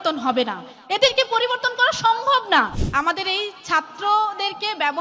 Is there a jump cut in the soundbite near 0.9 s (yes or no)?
no